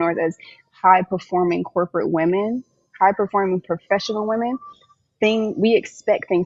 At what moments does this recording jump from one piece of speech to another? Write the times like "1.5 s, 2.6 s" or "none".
none